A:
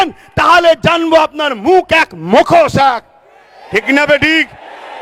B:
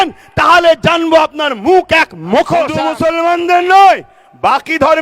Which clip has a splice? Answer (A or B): B